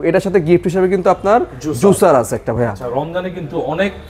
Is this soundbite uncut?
yes; 0 cuts

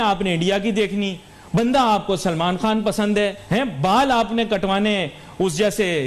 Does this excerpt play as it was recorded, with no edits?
no; 1 cut; at 3.4 s

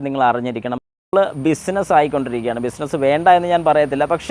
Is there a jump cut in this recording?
yes; 1 cut; at 1.0 s

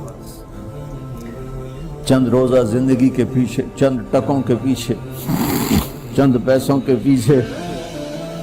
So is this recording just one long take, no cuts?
no; 1 cut; at 7.5 s

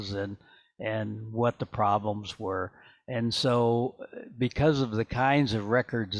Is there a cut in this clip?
no; 0 cuts

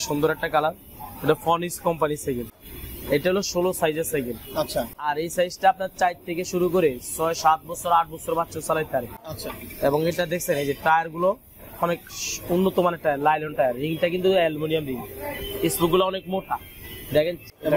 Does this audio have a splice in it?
no; 0 cuts

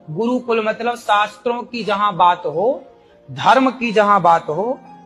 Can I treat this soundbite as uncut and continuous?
yes; 0 cuts

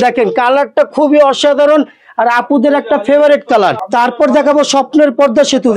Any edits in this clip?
yes; 1 cut; at 3.8 s

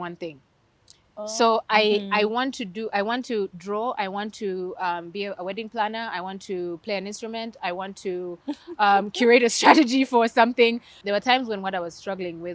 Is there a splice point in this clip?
yes; 1 cut; at 10.9 s

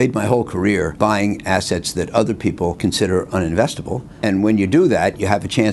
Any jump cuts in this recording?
yes; 3 cuts; at 0.9 s, 2.8 s, 4.0 s

